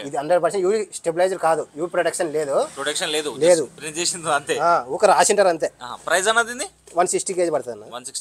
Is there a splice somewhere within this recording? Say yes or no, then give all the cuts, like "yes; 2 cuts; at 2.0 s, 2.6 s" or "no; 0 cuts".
no; 0 cuts